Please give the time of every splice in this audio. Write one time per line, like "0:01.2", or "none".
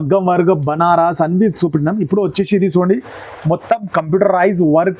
none